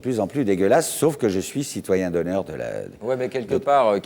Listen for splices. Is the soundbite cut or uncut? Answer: uncut